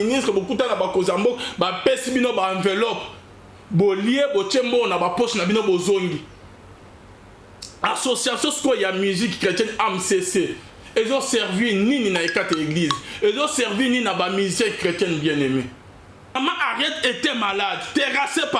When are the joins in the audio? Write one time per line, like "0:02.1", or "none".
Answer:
0:16.4